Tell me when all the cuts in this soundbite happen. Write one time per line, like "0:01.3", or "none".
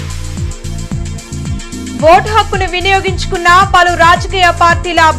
none